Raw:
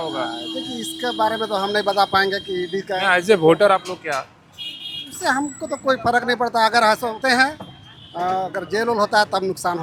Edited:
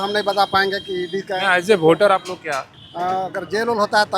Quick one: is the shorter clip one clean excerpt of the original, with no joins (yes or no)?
no